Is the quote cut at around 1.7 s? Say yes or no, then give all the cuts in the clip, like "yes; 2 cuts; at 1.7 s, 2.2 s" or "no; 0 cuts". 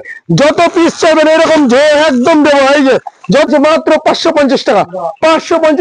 no; 1 cut; at 3.5 s